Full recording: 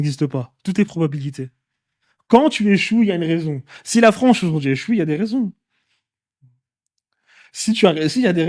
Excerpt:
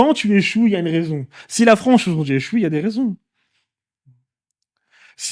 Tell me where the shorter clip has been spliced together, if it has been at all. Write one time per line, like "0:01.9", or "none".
none